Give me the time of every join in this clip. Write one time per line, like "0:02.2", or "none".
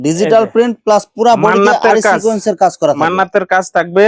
none